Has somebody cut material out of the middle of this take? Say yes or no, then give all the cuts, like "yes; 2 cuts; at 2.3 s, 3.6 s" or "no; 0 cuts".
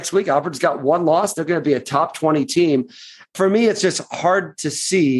yes; 1 cut; at 3.3 s